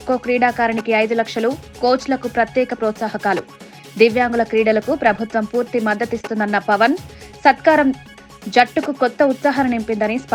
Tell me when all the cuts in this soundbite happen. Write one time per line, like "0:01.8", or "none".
none